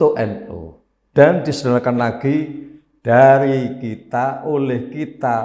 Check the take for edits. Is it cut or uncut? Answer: uncut